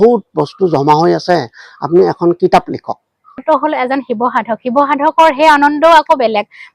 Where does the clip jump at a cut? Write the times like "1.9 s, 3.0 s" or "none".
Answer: 3.4 s